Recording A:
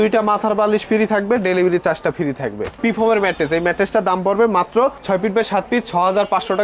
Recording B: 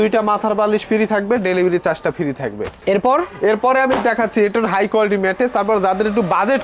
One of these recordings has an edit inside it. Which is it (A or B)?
A